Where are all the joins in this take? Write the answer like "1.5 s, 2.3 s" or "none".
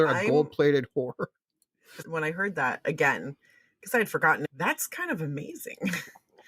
2.0 s, 4.5 s